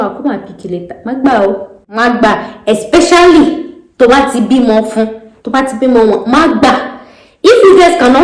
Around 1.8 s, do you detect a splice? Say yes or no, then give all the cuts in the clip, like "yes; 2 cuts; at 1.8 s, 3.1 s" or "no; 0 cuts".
yes; 1 cut; at 1.8 s